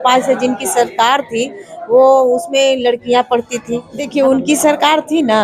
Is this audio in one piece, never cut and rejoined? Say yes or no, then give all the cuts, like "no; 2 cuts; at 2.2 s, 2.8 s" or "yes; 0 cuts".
no; 1 cut; at 4.0 s